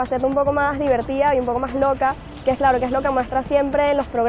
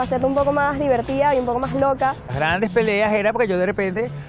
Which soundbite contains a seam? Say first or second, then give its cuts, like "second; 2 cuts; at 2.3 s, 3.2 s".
second; 1 cut; at 2.3 s